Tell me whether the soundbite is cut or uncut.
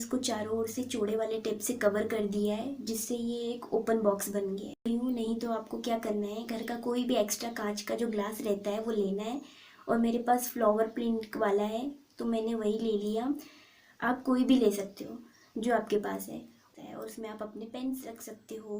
cut